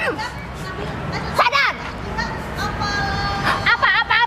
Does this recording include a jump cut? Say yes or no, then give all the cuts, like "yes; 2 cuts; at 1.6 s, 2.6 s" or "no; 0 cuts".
no; 0 cuts